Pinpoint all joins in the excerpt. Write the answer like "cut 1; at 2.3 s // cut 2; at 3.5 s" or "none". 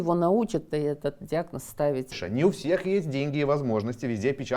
cut 1; at 2.2 s